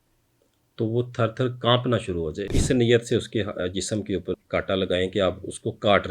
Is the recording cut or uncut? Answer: cut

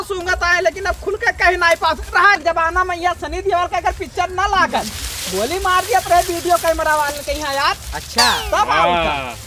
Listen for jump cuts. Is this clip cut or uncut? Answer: cut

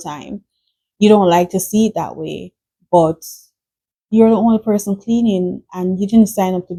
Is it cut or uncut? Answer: uncut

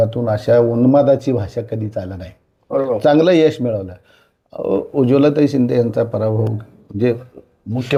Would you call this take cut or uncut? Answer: uncut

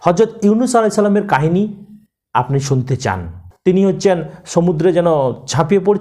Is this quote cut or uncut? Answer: cut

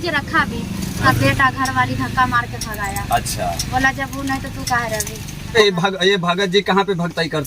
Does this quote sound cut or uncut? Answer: cut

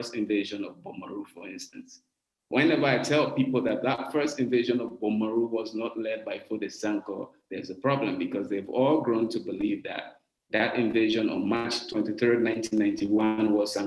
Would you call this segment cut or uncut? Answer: uncut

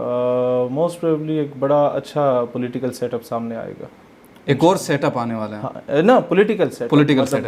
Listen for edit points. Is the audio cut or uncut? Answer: uncut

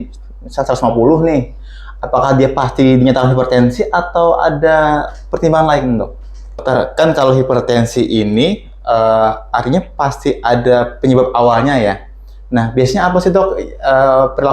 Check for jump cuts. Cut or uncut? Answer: cut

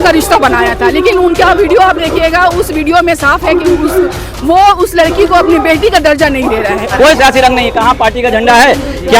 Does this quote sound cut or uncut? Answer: cut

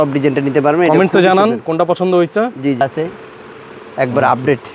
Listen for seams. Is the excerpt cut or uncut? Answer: cut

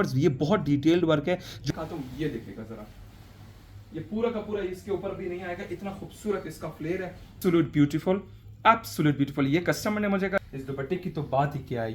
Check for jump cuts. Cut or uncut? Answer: cut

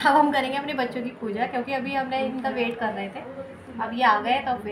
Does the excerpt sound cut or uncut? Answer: uncut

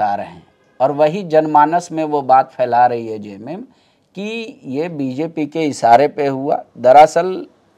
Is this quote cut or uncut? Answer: uncut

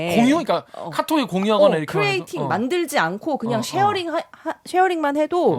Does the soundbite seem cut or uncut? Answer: uncut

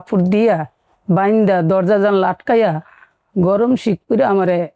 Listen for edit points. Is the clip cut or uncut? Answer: uncut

